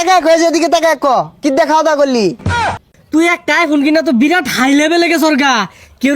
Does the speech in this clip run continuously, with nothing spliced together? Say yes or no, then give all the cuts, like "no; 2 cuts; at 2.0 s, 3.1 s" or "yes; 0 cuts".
no; 1 cut; at 2.5 s